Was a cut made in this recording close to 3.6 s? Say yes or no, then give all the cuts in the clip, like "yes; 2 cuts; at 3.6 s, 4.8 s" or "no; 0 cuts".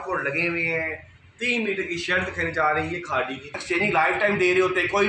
yes; 1 cut; at 3.6 s